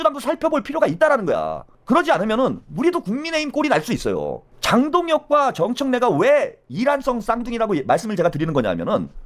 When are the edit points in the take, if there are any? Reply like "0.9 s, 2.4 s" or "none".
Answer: none

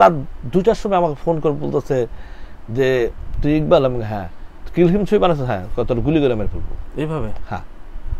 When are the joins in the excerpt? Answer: none

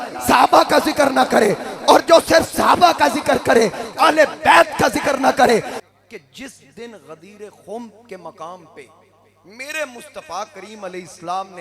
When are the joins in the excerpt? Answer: 5.8 s

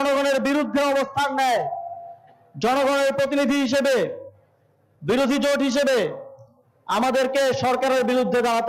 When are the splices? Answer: none

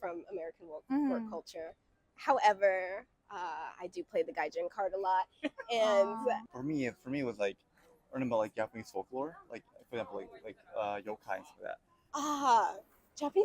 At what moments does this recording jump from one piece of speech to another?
6.5 s, 11.9 s

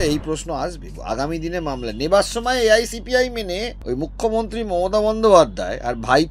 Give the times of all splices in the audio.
3.7 s

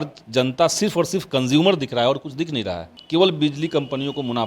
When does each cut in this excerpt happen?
2.9 s

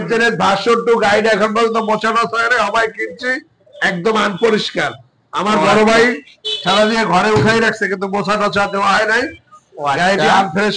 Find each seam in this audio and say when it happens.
none

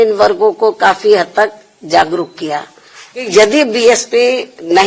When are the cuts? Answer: 3.3 s

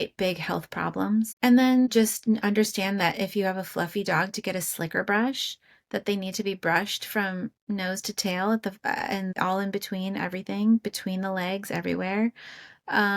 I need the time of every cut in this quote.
none

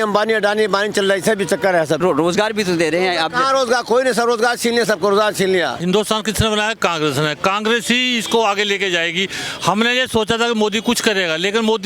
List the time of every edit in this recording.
2.0 s, 5.8 s

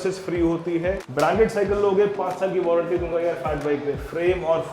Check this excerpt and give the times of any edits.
1.0 s

